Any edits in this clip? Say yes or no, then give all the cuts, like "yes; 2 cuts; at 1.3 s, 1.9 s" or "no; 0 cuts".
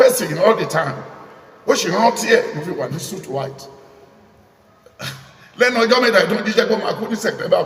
no; 0 cuts